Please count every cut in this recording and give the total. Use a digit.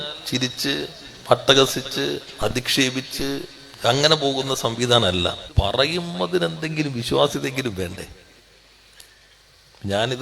1